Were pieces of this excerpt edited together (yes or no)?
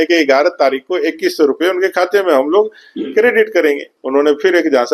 yes